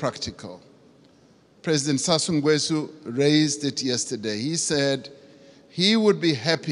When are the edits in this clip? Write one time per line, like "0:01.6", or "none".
0:00.9